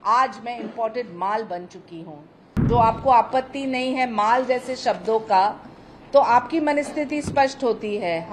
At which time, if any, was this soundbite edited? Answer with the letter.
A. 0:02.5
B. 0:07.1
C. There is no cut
A